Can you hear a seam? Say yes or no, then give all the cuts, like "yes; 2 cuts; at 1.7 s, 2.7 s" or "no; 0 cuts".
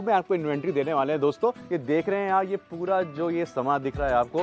no; 0 cuts